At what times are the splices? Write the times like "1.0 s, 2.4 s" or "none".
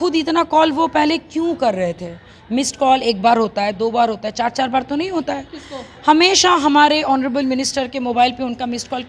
none